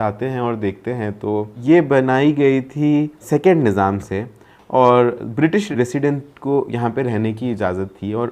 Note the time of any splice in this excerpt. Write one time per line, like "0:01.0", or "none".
0:01.5
0:03.2
0:05.7